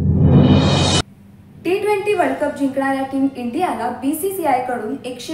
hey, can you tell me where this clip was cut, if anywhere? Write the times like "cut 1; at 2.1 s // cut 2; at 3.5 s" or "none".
none